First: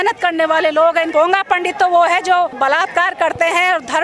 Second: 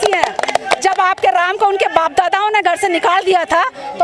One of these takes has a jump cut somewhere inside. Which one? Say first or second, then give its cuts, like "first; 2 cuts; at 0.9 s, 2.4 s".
first; 2 cuts; at 1.1 s, 2.5 s